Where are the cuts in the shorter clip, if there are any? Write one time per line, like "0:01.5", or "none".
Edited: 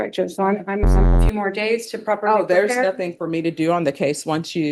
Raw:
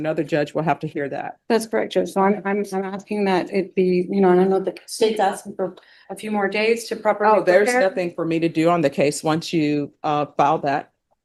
0:01.2